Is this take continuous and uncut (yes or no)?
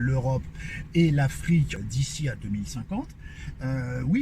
no